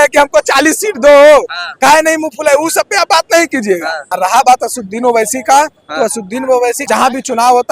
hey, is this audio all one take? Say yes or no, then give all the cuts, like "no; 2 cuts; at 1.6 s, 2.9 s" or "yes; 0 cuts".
no; 2 cuts; at 4.0 s, 6.8 s